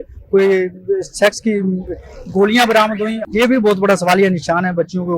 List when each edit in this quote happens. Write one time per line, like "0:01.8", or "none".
0:03.2